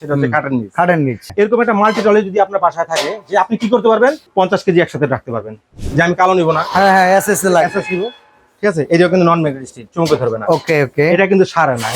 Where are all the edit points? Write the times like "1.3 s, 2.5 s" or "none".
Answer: 1.2 s, 4.2 s, 5.7 s